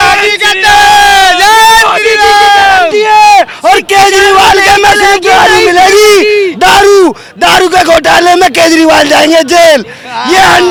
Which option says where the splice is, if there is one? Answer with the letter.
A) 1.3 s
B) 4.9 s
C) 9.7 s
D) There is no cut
D